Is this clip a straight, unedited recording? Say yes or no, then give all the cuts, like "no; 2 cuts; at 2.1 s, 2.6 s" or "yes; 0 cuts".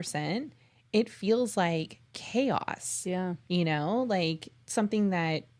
yes; 0 cuts